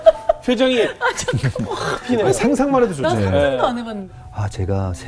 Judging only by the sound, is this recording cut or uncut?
cut